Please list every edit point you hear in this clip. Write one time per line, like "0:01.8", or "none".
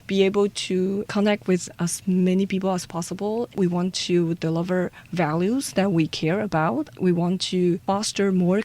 0:03.5
0:07.8